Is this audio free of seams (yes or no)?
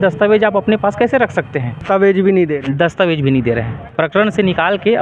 no